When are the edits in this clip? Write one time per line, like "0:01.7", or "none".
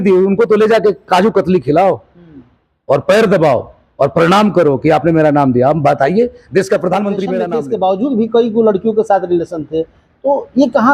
0:07.5